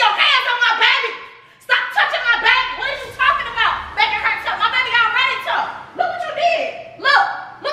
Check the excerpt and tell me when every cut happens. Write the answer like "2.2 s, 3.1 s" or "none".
none

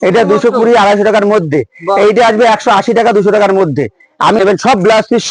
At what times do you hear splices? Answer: 4.4 s

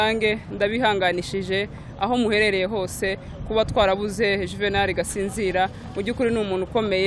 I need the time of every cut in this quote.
none

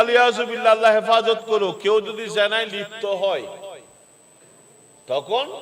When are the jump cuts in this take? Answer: none

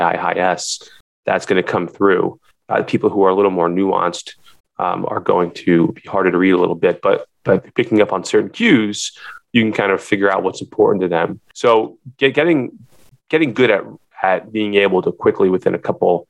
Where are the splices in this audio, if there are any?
11.5 s

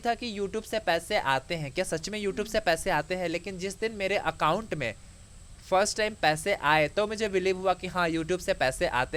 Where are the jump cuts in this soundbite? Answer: none

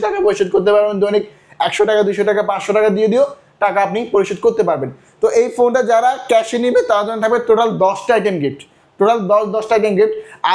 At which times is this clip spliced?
none

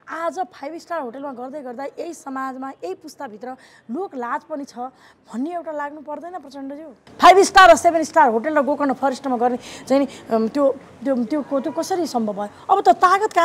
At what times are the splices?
7.0 s

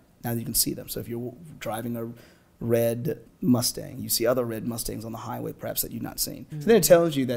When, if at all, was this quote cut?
3.3 s, 6.5 s

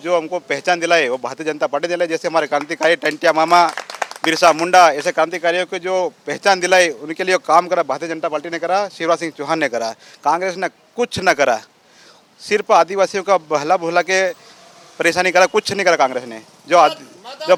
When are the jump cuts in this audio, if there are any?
none

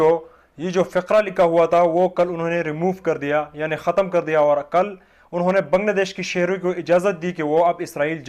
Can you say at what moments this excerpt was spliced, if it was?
none

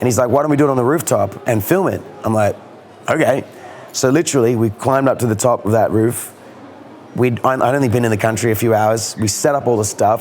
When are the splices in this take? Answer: 1.4 s

